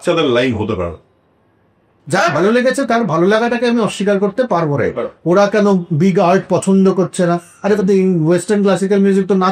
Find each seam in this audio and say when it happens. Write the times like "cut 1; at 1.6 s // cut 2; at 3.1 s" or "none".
cut 1; at 1.9 s

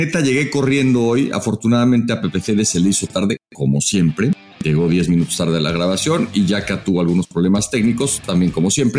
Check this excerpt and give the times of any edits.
none

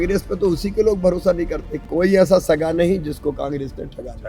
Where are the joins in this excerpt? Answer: cut 1; at 1.9 s

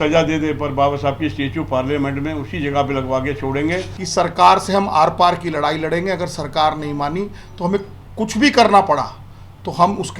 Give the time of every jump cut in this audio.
cut 1; at 4.0 s

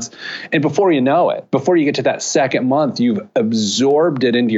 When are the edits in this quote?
none

